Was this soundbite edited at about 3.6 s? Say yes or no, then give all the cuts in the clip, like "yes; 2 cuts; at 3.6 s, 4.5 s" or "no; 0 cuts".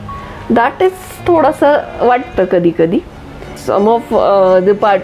yes; 1 cut; at 3.6 s